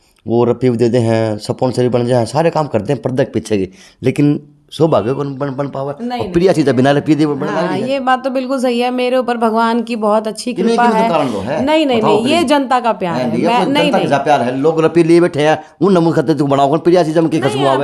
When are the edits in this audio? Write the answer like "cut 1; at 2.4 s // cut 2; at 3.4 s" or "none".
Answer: none